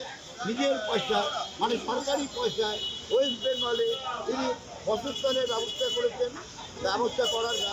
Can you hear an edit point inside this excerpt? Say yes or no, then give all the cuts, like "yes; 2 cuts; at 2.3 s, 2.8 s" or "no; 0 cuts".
no; 0 cuts